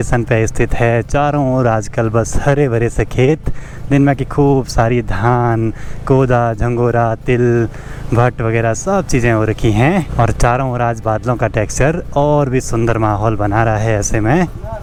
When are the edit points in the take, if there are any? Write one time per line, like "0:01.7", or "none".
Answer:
none